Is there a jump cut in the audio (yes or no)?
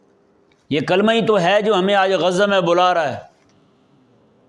no